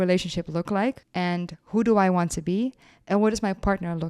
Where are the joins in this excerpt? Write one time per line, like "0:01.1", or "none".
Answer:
0:01.1